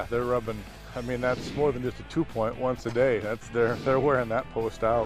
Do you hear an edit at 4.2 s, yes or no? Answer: no